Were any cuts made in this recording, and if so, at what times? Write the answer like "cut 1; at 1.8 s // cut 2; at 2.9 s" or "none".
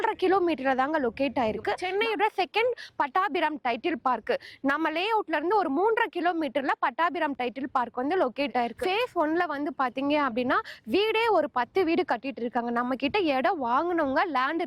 cut 1; at 1.8 s // cut 2; at 8.8 s